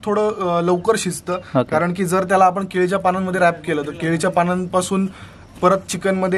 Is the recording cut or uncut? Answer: uncut